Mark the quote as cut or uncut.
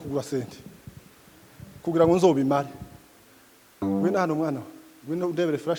uncut